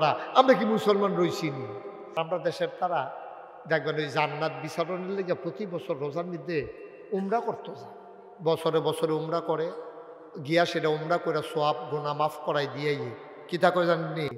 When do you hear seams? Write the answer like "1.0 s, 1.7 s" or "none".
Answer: 2.2 s